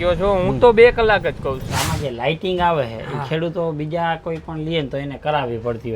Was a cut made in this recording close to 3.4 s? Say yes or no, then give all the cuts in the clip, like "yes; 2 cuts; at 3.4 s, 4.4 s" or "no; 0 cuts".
no; 1 cut; at 1.7 s